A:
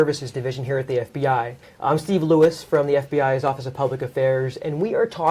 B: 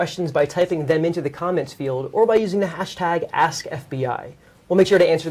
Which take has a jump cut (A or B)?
A